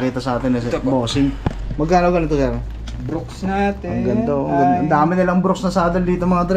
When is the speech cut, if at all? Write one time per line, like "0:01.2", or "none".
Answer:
none